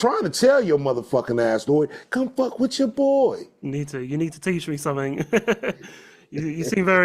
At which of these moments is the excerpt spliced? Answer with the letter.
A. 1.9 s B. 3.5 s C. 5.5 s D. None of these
D